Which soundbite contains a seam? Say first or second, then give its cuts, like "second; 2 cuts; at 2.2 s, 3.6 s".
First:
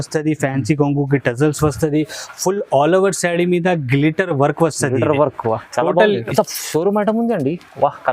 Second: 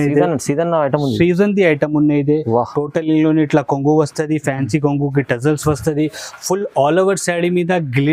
first; 1 cut; at 6.3 s